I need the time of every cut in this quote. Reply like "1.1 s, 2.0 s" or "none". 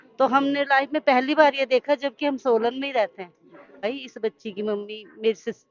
3.8 s

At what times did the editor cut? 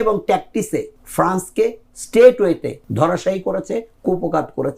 1.0 s, 2.8 s

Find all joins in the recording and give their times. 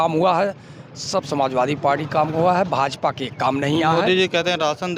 none

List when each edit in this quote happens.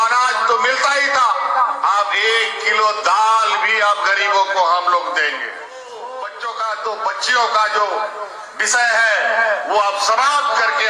5.9 s

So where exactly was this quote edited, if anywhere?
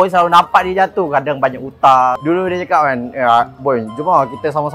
2.2 s

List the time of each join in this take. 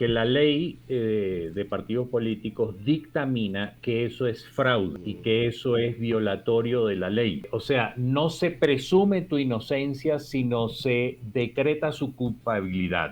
5.1 s, 7.5 s

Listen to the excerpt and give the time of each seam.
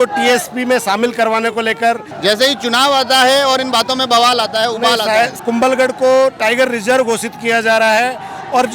2.1 s, 5.3 s

